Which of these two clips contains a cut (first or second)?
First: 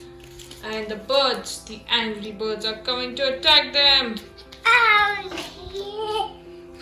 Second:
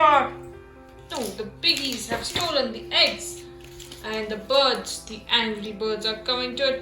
second